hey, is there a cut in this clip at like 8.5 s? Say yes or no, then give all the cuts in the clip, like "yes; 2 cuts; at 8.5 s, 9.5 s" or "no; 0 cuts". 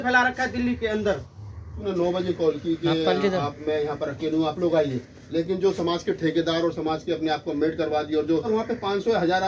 yes; 2 cuts; at 1.8 s, 8.5 s